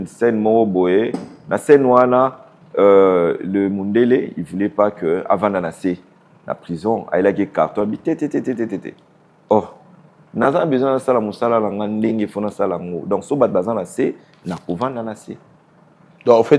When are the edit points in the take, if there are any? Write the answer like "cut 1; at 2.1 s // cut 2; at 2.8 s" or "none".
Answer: none